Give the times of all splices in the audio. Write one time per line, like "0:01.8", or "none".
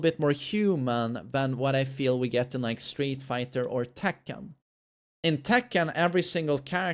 none